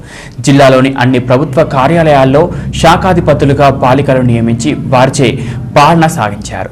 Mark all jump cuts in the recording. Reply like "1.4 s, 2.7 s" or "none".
none